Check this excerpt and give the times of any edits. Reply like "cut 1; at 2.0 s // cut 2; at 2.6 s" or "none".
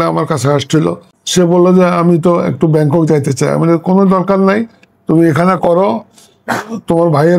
cut 1; at 1.1 s